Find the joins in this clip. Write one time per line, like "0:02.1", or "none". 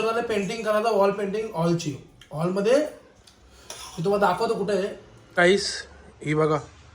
0:05.4